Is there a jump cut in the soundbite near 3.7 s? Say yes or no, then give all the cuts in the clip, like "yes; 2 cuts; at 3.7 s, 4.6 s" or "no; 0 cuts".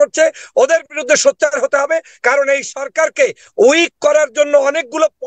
no; 0 cuts